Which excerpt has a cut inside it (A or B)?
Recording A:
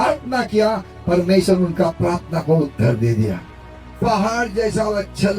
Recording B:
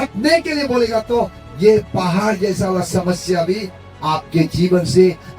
A